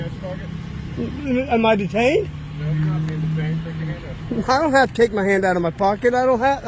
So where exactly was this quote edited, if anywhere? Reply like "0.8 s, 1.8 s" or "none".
none